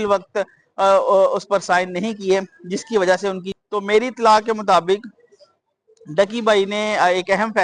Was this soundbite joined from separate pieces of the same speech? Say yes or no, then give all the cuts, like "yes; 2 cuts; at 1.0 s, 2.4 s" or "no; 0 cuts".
yes; 1 cut; at 3.4 s